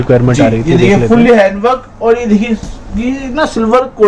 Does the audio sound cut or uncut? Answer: uncut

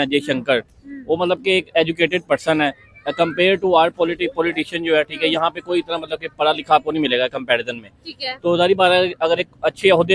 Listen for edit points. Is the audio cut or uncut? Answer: uncut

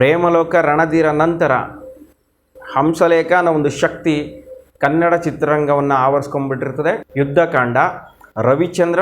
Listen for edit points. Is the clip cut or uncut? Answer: cut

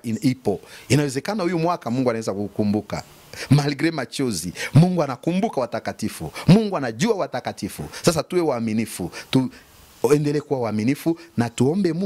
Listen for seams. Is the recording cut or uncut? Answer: uncut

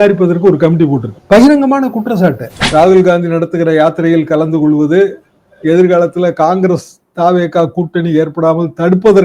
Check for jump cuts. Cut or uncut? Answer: cut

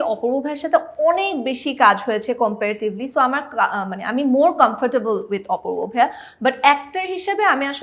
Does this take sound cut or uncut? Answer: uncut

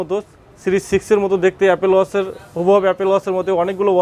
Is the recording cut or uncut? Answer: uncut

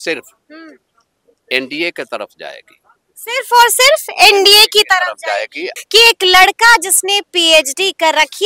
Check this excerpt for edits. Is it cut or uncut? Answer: cut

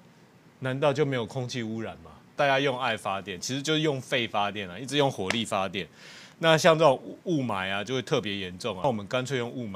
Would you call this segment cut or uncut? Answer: cut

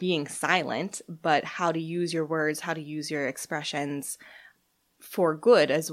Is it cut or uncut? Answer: cut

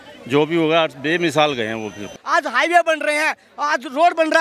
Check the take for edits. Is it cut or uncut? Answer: cut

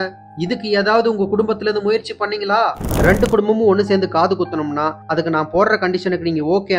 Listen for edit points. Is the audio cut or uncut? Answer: cut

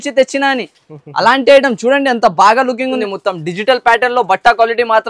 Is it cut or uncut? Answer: cut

